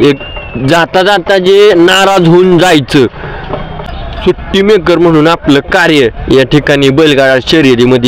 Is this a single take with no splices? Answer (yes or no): no